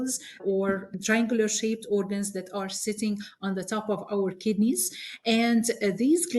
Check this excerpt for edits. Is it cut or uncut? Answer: uncut